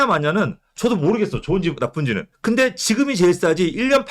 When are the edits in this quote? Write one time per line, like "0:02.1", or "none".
0:02.3